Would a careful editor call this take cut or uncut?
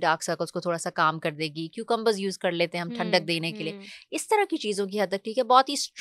uncut